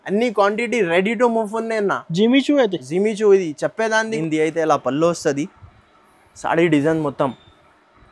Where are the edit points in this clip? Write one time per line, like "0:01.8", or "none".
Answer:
0:04.1